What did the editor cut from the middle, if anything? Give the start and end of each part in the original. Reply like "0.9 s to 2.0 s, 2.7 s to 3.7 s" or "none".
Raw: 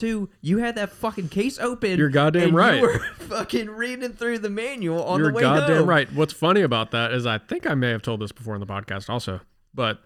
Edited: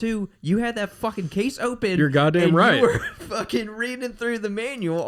none